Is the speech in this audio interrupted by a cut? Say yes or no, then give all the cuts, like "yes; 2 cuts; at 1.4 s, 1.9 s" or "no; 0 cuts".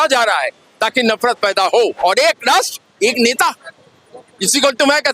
yes; 1 cut; at 1.9 s